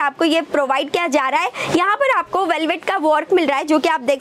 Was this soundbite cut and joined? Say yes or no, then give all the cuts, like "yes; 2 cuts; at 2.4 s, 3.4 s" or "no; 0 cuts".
no; 0 cuts